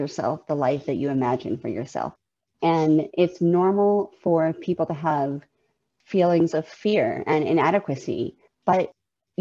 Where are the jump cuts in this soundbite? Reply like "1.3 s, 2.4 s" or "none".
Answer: 2.2 s, 8.5 s